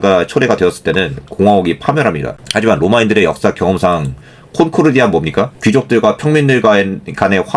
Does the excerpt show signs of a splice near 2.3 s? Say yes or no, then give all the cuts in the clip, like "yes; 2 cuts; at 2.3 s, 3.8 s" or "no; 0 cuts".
yes; 2 cuts; at 2.3 s, 5.5 s